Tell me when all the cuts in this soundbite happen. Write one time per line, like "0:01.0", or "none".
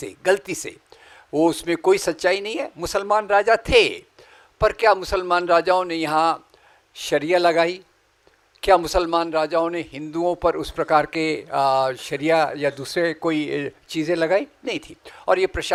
none